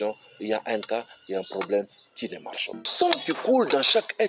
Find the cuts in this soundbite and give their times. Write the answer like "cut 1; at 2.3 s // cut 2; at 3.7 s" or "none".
cut 1; at 2.8 s

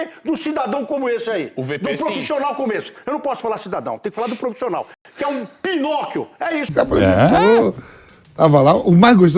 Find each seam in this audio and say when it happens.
cut 1; at 6.7 s

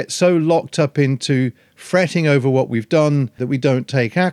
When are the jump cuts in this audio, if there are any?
cut 1; at 3.4 s

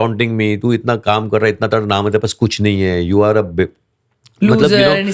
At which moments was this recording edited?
none

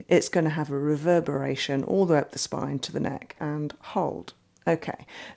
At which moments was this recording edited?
cut 1; at 3.4 s

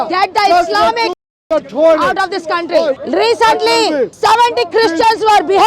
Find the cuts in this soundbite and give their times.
cut 1; at 3.0 s // cut 2; at 4.1 s

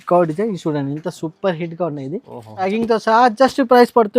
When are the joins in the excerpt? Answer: cut 1; at 2.7 s

